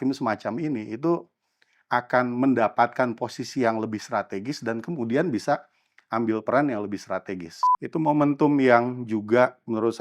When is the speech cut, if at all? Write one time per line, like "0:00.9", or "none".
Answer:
0:07.5